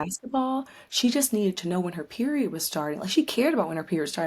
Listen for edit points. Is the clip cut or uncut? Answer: uncut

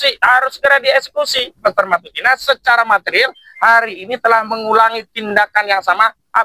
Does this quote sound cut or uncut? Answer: cut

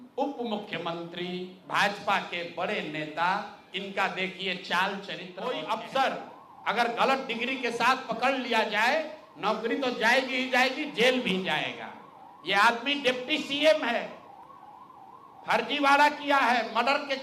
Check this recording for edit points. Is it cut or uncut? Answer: cut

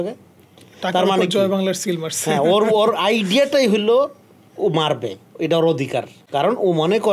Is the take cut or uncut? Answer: cut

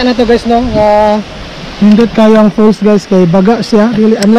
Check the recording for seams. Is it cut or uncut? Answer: uncut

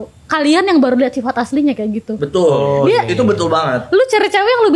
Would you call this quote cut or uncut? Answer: uncut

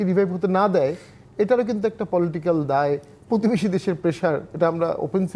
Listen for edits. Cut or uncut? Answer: uncut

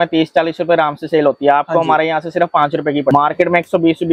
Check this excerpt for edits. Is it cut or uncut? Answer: cut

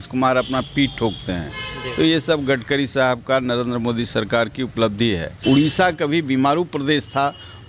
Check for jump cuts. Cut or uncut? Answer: cut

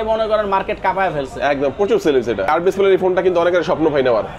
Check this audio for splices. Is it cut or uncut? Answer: cut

